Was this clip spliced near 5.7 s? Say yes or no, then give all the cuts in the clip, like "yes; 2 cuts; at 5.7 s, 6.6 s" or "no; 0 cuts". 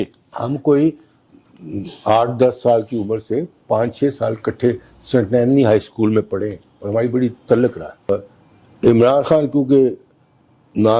no; 1 cut; at 8.1 s